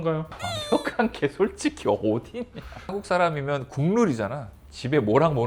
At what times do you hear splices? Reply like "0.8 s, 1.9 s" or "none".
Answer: 2.8 s